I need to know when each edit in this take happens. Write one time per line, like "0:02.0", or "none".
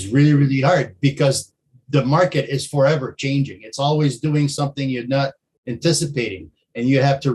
none